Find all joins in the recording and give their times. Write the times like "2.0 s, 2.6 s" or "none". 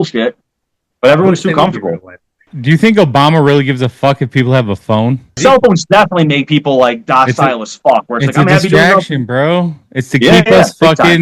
2.5 s, 5.4 s

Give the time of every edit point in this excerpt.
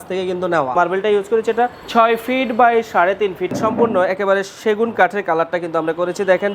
0.7 s, 1.8 s, 3.5 s

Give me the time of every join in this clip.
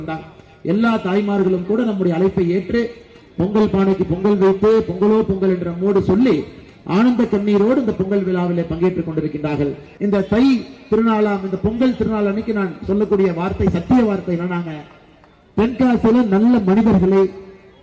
9.9 s

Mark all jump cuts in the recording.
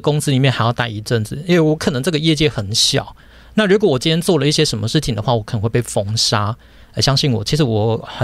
none

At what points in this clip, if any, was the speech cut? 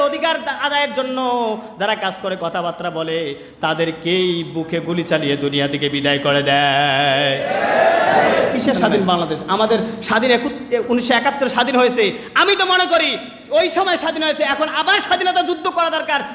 8.1 s

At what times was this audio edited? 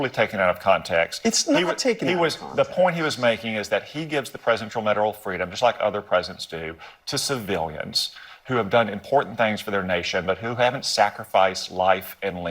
2.5 s

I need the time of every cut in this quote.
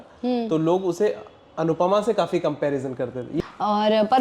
3.3 s

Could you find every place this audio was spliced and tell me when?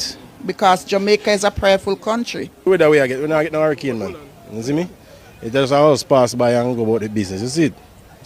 none

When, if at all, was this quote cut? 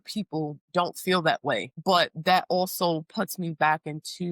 1.7 s

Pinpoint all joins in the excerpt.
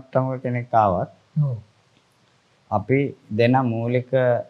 none

